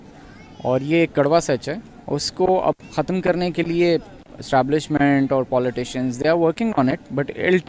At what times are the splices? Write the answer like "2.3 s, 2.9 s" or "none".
none